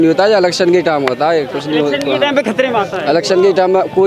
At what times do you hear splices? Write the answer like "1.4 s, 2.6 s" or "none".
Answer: none

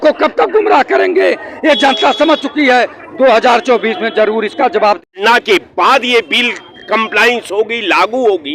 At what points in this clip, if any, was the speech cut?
5.0 s

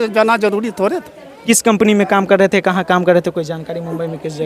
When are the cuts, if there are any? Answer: 1.3 s

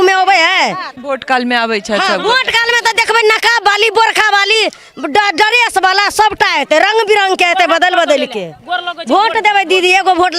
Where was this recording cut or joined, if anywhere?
0.9 s

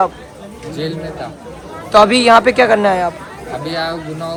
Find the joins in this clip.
none

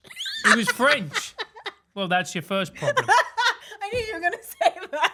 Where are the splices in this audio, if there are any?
none

